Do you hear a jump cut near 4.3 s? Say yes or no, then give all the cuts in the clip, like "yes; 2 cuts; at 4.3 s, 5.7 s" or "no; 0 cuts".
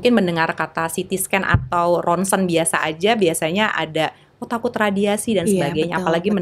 no; 0 cuts